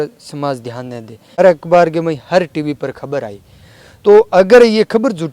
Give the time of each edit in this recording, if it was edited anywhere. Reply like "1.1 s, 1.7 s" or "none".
1.4 s